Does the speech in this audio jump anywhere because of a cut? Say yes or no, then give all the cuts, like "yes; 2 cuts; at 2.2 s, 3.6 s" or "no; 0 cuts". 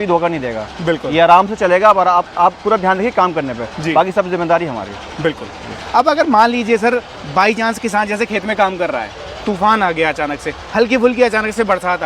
no; 0 cuts